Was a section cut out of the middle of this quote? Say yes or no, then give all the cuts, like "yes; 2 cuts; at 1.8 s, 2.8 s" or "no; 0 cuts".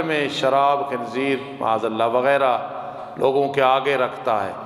no; 0 cuts